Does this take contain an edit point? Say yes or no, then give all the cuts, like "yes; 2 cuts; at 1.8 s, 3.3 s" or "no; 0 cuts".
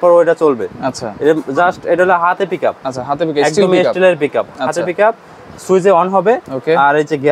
no; 0 cuts